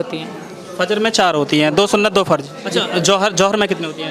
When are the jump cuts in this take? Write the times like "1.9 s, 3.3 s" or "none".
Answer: 2.6 s